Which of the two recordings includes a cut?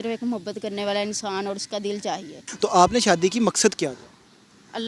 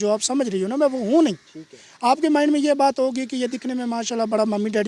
first; 1 cut; at 2.4 s

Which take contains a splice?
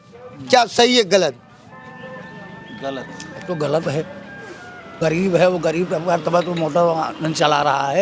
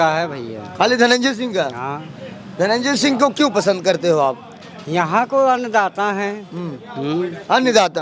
first; 1 cut; at 5.0 s

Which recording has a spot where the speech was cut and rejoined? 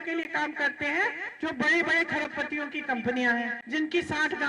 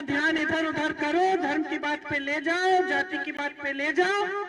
first; 2 cuts; at 1.2 s, 3.6 s

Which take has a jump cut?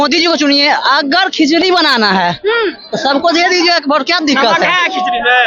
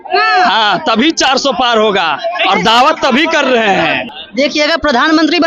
second; 1 cut; at 4.0 s

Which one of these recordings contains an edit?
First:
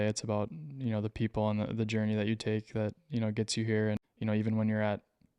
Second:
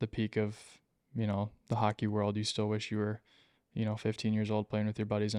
first; 1 cut; at 4.1 s

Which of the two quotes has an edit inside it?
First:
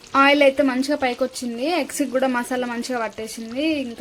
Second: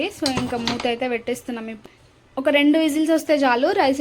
second; 1 cut; at 1.8 s

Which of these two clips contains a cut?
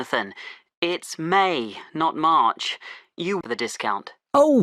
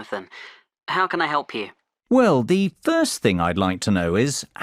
first; 1 cut; at 3.4 s

